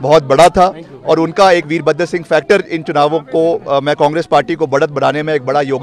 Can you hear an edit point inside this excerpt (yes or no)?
no